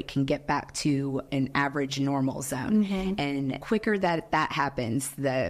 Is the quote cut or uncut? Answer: uncut